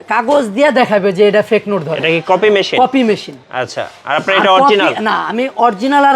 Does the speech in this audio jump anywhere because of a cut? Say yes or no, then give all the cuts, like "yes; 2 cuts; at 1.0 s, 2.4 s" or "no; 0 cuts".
no; 0 cuts